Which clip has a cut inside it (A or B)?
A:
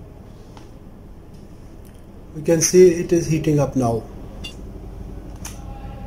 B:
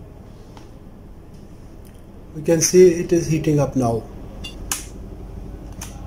A